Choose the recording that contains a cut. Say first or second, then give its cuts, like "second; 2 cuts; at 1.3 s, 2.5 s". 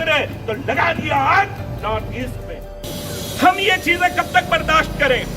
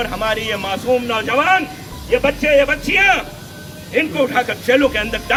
first; 1 cut; at 2.8 s